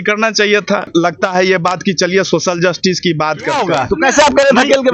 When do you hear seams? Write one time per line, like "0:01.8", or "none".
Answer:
0:00.9
0:03.7